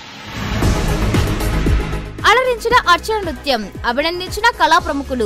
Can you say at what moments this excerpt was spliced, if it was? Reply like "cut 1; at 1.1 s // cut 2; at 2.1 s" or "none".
cut 1; at 1.7 s